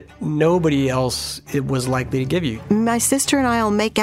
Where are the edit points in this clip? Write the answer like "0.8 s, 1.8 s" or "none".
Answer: 2.6 s